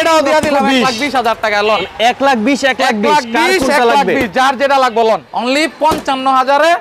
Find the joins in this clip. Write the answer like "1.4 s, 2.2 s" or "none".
5.3 s